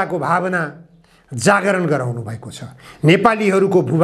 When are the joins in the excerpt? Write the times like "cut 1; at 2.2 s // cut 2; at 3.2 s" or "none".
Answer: none